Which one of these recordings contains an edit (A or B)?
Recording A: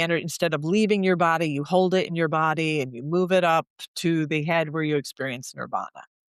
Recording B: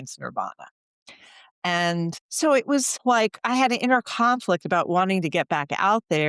B